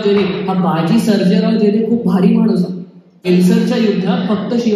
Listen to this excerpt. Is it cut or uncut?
cut